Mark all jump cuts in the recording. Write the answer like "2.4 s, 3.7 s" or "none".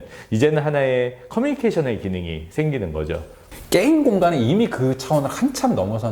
3.4 s